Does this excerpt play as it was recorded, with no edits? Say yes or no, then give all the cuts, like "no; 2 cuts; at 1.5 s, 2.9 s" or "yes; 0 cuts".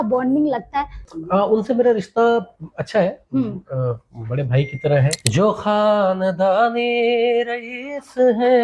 no; 2 cuts; at 1.0 s, 5.2 s